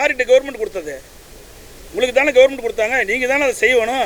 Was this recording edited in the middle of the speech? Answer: no; 0 cuts

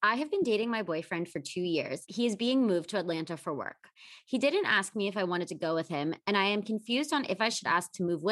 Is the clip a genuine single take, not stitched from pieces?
no; 1 cut; at 2.1 s

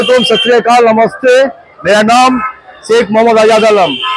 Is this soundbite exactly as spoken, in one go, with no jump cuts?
yes; 0 cuts

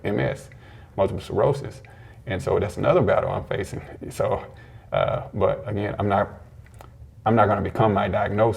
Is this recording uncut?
yes; 0 cuts

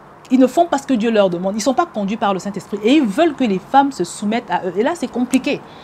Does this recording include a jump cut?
no; 0 cuts

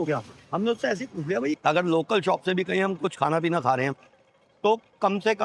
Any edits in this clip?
yes; 1 cut; at 1.5 s

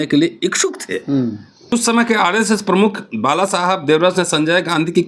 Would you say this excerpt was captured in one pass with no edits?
no; 1 cut; at 1.7 s

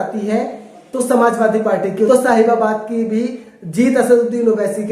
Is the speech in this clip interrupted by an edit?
yes; 1 cut; at 2.1 s

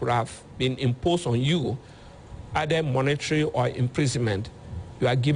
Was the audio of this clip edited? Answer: no; 0 cuts

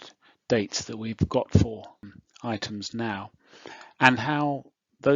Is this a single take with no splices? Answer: no; 1 cut; at 2.0 s

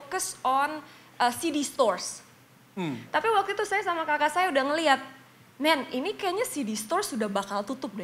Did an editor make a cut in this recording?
no; 0 cuts

